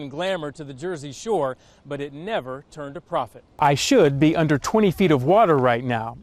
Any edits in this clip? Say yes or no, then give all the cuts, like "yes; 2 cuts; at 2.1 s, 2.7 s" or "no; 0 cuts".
yes; 1 cut; at 3.4 s